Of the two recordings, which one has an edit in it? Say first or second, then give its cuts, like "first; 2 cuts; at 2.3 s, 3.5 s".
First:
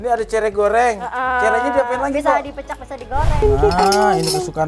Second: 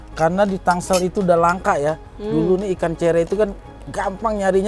first; 1 cut; at 3.4 s